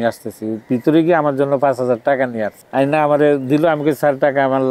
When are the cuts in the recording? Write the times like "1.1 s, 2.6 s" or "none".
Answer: 2.6 s

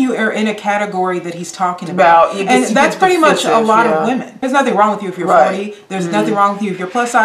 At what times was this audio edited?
4.3 s

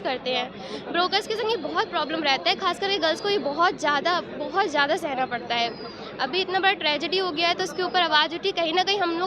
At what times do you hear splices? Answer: none

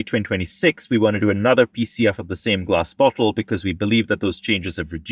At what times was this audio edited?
none

